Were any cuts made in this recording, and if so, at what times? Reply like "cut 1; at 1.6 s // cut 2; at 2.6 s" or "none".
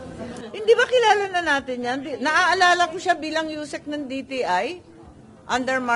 none

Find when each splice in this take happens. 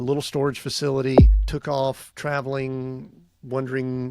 cut 1; at 1.4 s

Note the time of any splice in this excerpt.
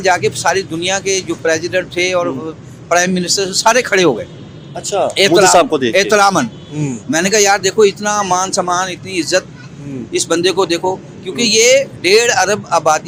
none

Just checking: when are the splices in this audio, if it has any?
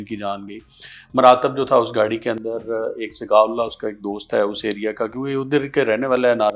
none

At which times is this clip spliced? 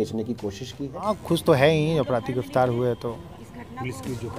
cut 1; at 1.0 s

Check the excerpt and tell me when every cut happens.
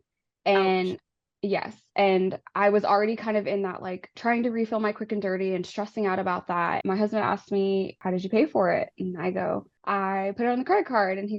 cut 1; at 6.8 s // cut 2; at 8.0 s // cut 3; at 9.7 s

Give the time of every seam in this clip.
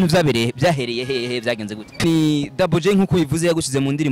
cut 1; at 2.0 s

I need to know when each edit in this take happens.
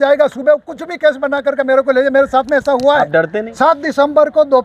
cut 1; at 3.4 s

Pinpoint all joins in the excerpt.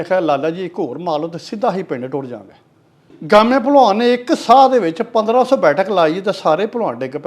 cut 1; at 3.1 s

